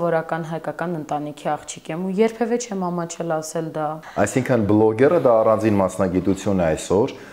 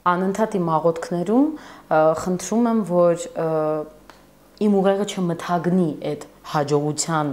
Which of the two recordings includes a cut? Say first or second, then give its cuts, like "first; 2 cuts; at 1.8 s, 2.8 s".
first; 1 cut; at 4.0 s